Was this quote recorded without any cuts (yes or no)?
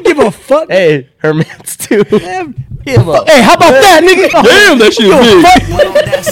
no